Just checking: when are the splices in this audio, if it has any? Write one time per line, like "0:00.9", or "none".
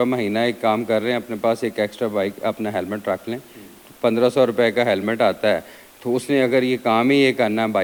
none